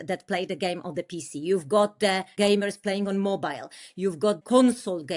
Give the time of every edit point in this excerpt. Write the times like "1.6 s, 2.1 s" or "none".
2.3 s, 4.4 s